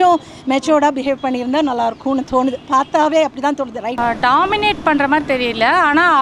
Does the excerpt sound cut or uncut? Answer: cut